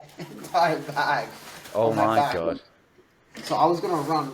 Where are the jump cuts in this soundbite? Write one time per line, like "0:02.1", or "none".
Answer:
none